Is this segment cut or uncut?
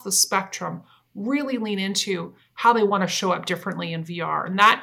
uncut